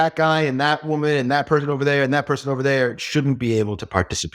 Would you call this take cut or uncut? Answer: uncut